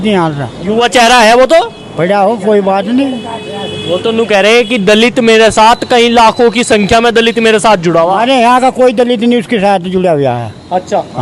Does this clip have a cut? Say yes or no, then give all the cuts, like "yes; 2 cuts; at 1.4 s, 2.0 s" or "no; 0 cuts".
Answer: no; 0 cuts